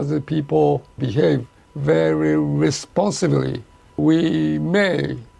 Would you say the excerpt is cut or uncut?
uncut